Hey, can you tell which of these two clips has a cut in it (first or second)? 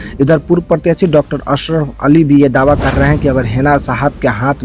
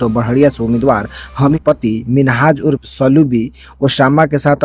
second